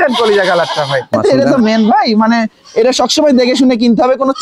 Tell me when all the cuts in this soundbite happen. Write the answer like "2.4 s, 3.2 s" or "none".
1.2 s